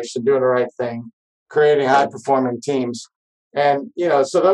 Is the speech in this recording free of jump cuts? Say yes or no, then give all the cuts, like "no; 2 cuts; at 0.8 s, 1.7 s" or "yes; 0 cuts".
yes; 0 cuts